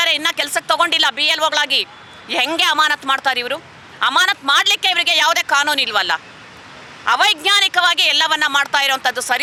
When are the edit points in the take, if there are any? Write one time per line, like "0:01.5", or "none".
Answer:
none